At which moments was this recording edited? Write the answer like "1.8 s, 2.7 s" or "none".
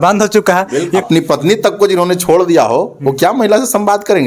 1.0 s